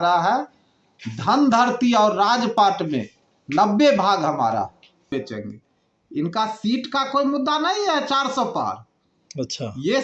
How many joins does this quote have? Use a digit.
1